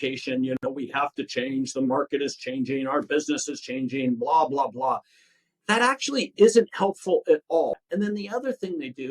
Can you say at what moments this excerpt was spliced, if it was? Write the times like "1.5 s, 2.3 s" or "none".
7.8 s